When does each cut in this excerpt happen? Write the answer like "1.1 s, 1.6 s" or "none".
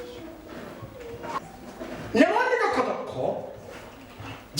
1.4 s